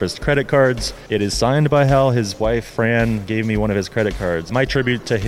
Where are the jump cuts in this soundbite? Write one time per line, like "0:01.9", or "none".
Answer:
0:02.7